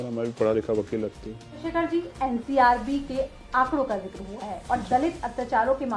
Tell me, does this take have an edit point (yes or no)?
yes